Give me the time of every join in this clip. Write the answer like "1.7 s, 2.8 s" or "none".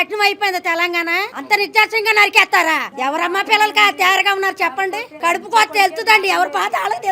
1.3 s, 2.9 s, 5.1 s